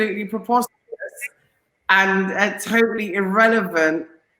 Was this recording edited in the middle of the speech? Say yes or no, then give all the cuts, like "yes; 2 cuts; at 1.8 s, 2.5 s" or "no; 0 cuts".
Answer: no; 0 cuts